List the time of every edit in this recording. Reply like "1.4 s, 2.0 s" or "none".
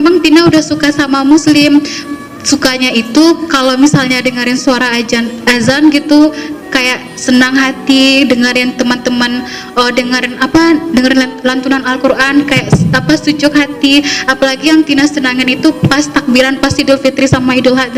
none